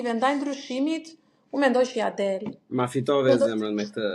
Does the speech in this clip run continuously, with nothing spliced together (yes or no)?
yes